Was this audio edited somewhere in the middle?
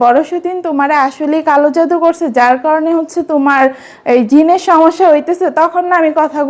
no; 0 cuts

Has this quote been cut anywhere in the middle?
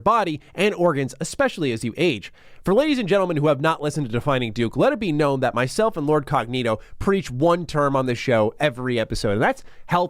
no; 0 cuts

